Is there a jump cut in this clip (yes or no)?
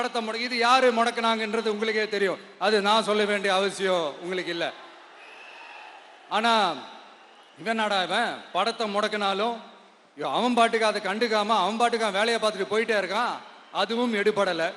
no